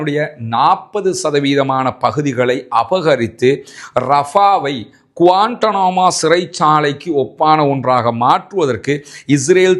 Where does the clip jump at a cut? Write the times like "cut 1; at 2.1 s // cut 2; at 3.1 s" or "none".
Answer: none